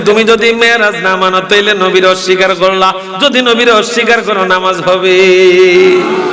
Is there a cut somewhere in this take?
no; 0 cuts

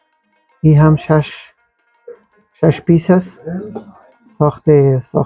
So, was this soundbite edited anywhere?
no; 0 cuts

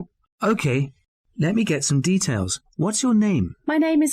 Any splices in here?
no; 0 cuts

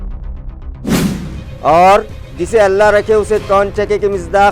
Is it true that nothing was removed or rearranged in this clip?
no; 1 cut; at 0.9 s

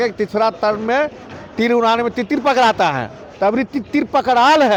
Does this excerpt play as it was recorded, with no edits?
yes; 0 cuts

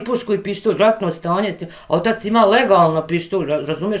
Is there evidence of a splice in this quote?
no; 0 cuts

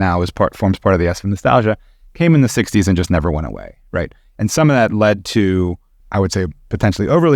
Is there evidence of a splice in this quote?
yes; 1 cut; at 6.0 s

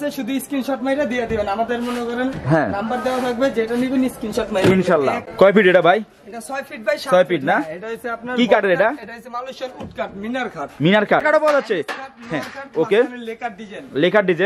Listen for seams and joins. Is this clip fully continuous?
no; 2 cuts; at 5.3 s, 11.2 s

